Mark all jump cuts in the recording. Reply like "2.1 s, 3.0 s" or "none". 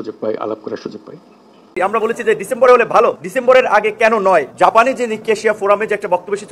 1.8 s